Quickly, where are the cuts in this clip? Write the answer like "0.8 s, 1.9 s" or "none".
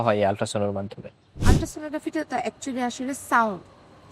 1.5 s